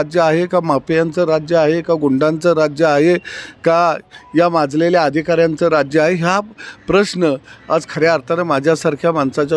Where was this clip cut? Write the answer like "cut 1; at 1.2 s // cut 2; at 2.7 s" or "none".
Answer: none